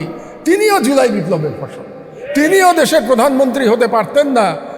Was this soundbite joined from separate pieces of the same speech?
no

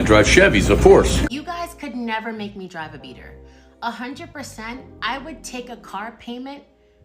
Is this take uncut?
no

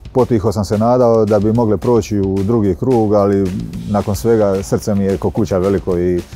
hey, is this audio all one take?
yes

